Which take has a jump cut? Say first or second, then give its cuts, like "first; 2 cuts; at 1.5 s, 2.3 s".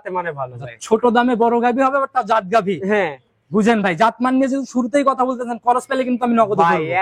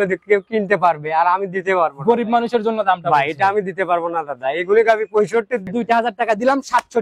second; 1 cut; at 5.7 s